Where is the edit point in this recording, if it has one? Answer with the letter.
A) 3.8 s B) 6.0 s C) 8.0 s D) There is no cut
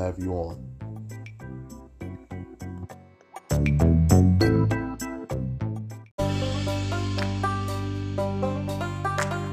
B